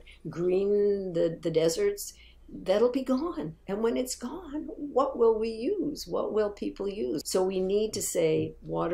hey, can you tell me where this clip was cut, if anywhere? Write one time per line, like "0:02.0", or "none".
0:07.2